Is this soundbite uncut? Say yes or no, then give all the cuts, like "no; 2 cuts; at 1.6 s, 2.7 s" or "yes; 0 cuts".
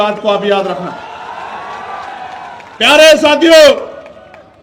yes; 0 cuts